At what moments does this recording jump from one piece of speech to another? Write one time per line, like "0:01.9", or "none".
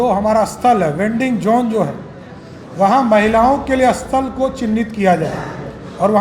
none